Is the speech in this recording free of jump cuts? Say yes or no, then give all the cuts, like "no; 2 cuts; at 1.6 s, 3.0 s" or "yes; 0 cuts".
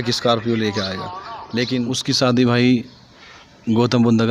no; 1 cut; at 1.9 s